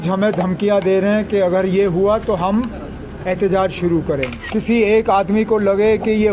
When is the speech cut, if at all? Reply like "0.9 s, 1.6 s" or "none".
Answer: 4.4 s